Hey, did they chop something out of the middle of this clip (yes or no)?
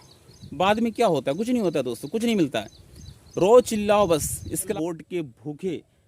yes